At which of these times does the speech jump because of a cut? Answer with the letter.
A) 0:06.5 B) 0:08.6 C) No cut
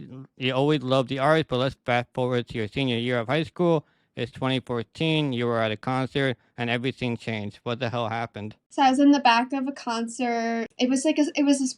C